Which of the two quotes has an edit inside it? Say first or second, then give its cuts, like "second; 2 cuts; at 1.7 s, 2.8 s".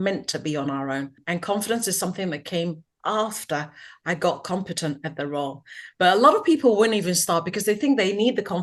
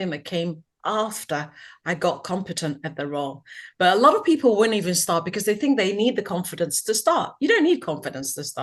first; 1 cut; at 1.2 s